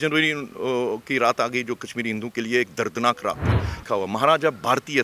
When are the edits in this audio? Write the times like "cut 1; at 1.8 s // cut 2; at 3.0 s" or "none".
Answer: cut 1; at 3.8 s